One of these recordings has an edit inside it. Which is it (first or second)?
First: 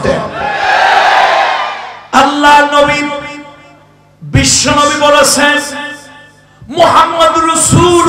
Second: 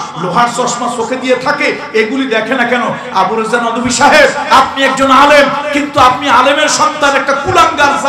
first